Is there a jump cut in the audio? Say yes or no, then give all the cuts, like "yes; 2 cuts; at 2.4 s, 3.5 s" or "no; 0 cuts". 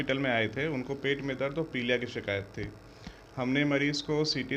no; 0 cuts